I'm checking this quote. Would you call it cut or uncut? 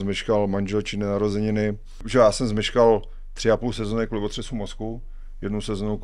cut